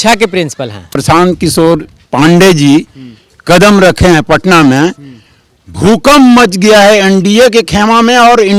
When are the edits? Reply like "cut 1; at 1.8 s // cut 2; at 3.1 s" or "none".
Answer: cut 1; at 1.0 s

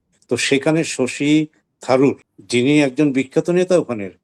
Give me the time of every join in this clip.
cut 1; at 2.3 s

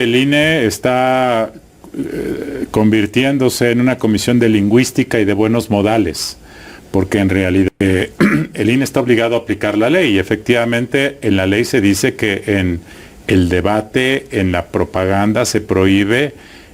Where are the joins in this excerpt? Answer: cut 1; at 7.8 s

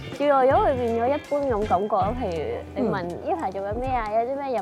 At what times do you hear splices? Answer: none

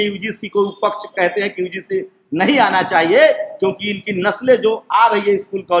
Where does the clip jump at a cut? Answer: none

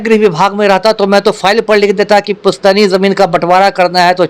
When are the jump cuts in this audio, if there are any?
none

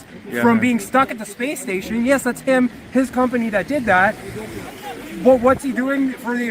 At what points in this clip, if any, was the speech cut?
cut 1; at 5.2 s

